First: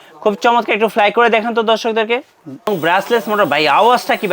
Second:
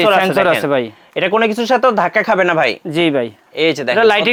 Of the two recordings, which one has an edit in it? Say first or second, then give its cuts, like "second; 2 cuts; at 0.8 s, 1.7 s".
first; 1 cut; at 2.7 s